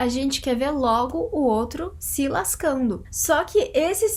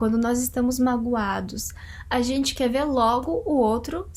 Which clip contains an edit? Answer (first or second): first